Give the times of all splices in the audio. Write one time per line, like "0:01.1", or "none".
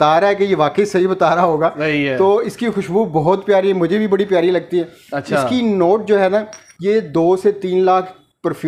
none